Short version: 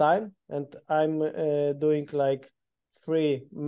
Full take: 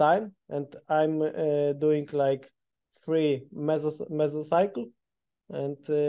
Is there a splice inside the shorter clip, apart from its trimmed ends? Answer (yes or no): no